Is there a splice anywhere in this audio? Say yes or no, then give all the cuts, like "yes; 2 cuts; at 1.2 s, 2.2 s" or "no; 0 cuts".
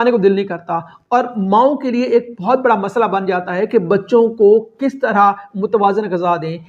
no; 0 cuts